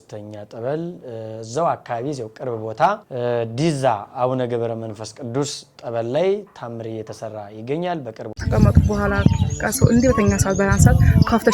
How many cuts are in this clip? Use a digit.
2